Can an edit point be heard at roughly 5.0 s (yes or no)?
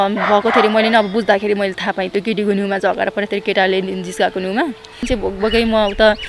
yes